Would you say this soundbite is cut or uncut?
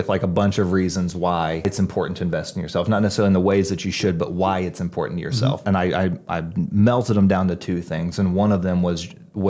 cut